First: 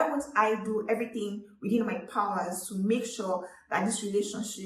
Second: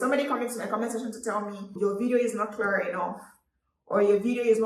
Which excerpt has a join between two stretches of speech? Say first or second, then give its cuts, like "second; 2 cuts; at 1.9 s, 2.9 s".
second; 1 cut; at 1.7 s